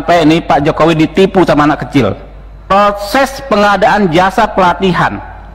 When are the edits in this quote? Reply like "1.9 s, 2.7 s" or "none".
2.7 s